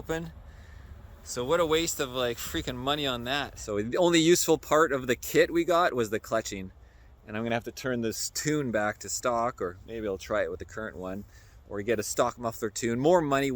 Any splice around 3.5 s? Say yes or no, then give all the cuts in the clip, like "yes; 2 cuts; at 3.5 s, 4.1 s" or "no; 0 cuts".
yes; 1 cut; at 3.5 s